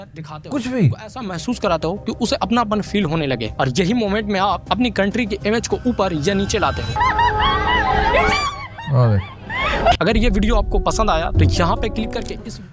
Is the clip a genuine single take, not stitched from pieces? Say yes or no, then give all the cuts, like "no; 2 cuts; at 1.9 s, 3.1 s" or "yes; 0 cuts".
yes; 0 cuts